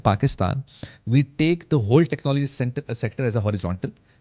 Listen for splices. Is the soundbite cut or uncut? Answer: uncut